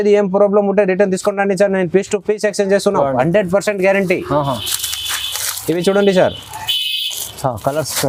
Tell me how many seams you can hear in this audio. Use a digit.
0